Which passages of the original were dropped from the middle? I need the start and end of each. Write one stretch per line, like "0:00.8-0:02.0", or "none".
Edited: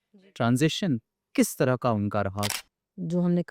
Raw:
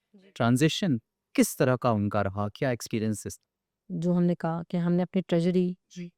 0:02.5-0:03.4